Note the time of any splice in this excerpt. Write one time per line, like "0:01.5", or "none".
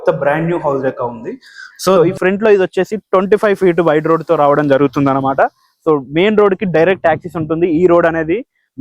0:02.0